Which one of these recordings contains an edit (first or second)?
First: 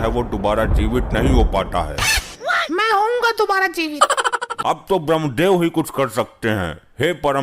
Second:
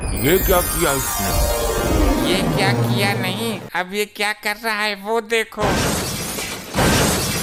first